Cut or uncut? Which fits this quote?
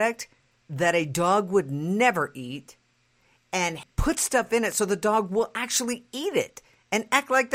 cut